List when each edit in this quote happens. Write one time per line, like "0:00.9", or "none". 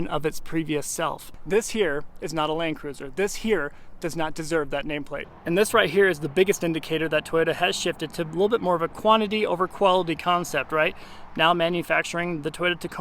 0:01.3
0:05.2

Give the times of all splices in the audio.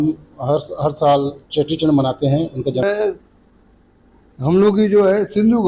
0:02.8

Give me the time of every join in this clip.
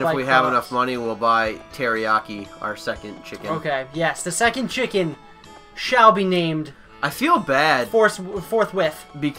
0:06.9

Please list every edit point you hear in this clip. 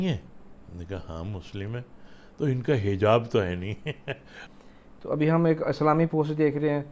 0:04.5

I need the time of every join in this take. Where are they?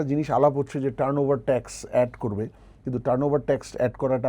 none

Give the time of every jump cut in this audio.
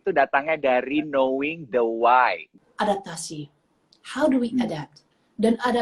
0:02.6

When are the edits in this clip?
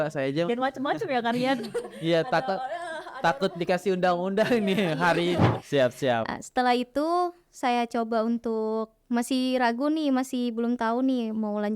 0:05.5

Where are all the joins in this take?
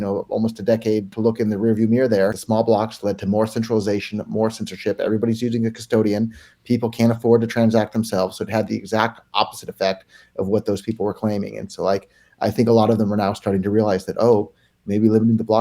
0:01.1
0:02.4

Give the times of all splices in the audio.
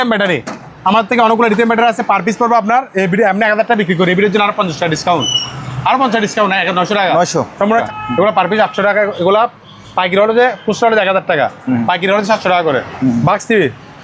0:07.8
0:12.9

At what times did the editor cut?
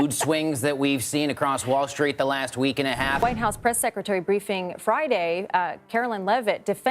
0:03.2

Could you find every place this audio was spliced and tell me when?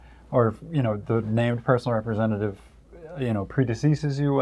none

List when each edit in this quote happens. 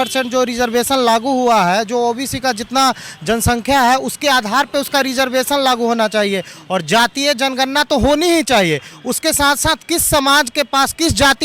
none

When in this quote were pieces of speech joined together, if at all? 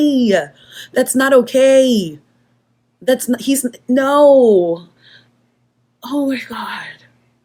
none

